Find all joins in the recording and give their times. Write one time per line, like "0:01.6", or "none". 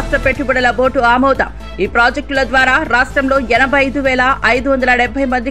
none